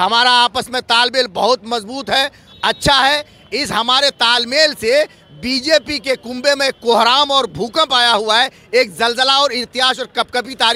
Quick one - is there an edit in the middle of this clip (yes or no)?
no